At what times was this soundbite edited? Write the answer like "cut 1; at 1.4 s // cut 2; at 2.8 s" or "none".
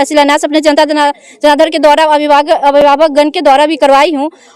none